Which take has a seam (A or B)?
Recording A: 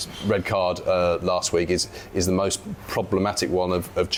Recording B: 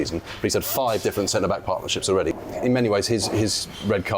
B